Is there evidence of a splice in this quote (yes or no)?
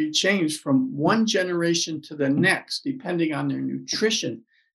no